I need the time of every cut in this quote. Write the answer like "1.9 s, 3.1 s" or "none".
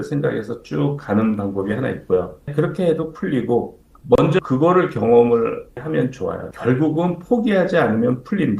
2.5 s, 3.9 s, 5.8 s